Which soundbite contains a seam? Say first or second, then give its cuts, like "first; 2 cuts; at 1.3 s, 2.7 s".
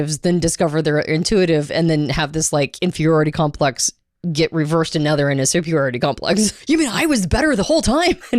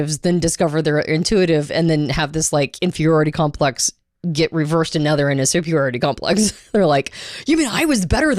first; 1 cut; at 6.6 s